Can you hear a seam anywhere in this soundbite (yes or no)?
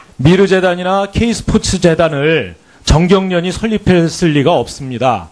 no